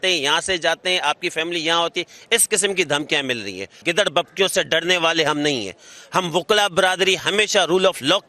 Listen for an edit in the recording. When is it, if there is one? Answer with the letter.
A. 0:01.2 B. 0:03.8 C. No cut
B